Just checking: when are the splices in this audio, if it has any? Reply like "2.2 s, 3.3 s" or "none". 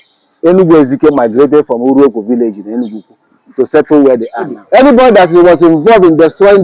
4.6 s